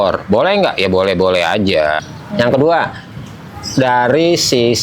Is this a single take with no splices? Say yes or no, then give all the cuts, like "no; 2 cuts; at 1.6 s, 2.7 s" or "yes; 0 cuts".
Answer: no; 1 cut; at 2.1 s